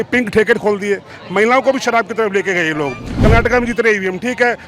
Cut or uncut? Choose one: cut